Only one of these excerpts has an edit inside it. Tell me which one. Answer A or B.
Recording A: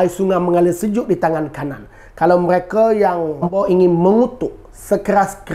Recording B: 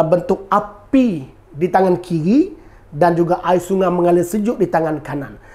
A